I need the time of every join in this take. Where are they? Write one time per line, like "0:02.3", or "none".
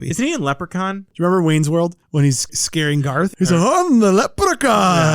0:01.1
0:02.8